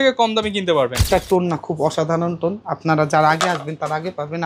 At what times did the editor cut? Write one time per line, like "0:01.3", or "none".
0:01.1